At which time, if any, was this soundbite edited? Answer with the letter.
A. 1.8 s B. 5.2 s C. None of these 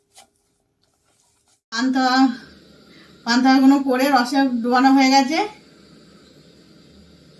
A